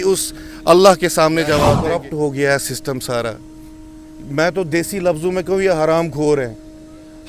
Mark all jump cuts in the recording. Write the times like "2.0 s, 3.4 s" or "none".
1.8 s